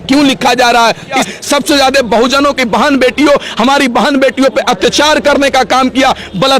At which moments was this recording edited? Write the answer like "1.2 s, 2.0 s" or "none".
1.2 s

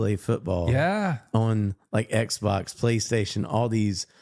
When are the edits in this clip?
none

